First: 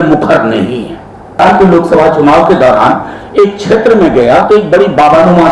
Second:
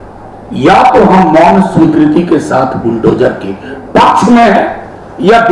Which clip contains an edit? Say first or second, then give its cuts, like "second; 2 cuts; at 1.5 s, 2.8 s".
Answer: first; 1 cut; at 1.4 s